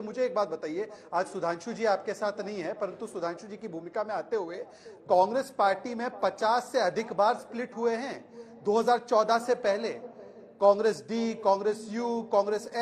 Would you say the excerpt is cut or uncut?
uncut